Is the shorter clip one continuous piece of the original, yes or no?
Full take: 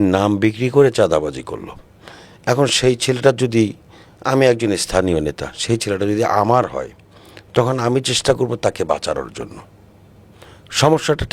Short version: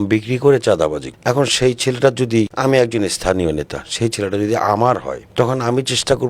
no